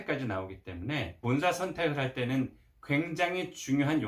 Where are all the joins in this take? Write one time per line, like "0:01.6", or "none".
0:01.2

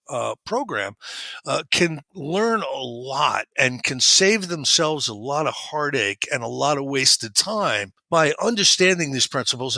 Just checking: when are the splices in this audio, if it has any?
0:07.9

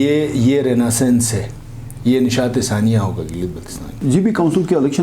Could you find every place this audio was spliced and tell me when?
0:03.9

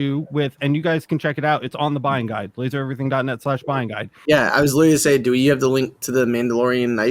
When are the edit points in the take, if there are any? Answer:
0:04.2

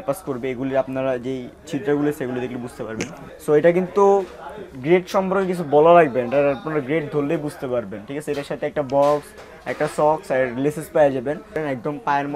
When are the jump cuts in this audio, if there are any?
0:03.2
0:11.6

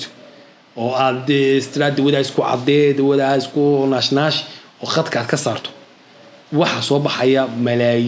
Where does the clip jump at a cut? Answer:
none

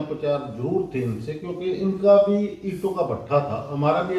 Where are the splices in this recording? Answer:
none

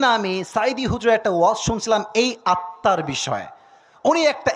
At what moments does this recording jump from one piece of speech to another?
none

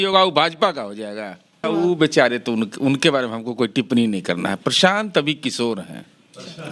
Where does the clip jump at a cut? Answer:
0:01.5

